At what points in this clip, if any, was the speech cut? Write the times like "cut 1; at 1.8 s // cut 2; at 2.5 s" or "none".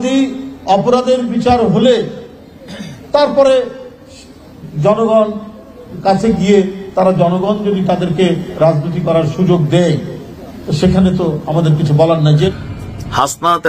cut 1; at 12.5 s